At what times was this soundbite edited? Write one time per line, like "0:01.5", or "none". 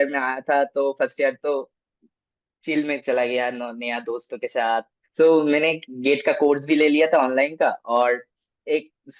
0:05.0